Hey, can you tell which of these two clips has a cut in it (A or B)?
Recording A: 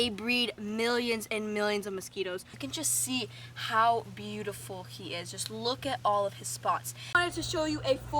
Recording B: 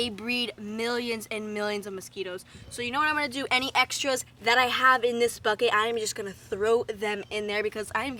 A